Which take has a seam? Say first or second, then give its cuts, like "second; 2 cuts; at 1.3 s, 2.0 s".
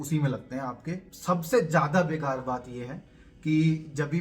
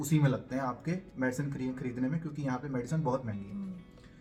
first; 1 cut; at 1.1 s